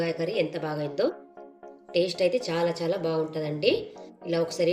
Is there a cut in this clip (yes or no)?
no